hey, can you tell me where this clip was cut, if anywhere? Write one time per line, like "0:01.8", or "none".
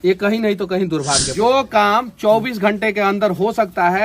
0:01.3